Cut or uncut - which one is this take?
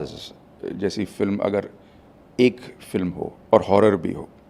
cut